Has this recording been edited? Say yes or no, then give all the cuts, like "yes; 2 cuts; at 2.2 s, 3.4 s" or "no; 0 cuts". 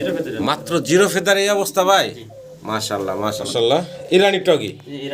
yes; 1 cut; at 3.4 s